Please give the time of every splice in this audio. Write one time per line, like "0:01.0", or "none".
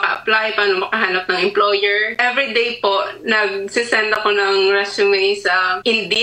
none